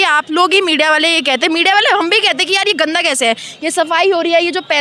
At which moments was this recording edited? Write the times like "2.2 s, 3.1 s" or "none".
none